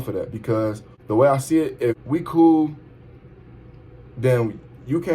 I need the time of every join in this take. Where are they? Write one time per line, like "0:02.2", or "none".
0:00.9
0:02.0